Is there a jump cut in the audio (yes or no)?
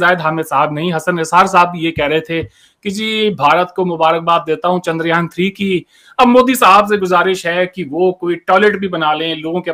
no